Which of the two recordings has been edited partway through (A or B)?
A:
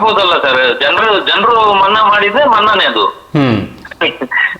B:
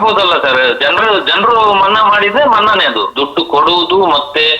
B